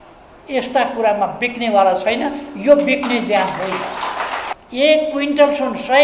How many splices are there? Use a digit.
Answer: 1